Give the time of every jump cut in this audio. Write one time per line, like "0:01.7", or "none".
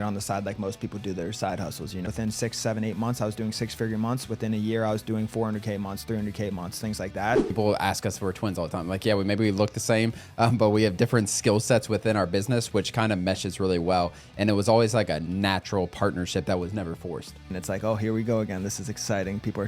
0:02.1
0:07.5
0:17.5